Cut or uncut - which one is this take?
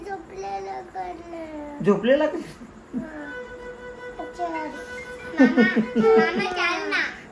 uncut